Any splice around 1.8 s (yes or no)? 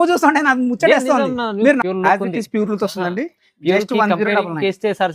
yes